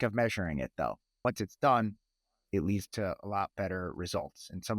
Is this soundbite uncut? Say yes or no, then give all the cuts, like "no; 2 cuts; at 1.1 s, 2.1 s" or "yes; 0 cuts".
no; 1 cut; at 1.2 s